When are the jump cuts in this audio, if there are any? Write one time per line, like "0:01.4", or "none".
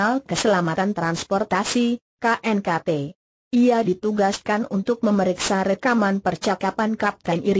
none